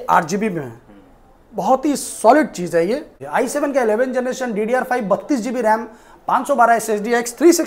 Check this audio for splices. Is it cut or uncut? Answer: cut